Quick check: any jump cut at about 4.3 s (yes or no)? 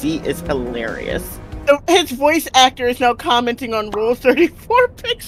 no